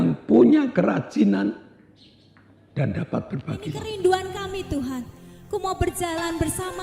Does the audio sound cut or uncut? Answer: cut